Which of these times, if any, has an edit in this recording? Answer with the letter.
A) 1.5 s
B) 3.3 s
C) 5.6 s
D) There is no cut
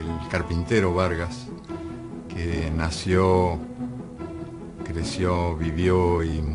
C